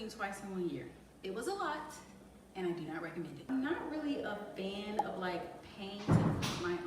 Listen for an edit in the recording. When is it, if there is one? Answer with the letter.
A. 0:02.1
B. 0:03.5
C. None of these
B